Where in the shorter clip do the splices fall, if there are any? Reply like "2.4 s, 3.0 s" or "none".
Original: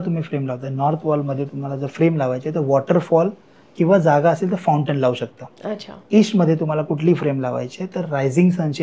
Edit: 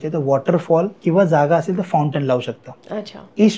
0.9 s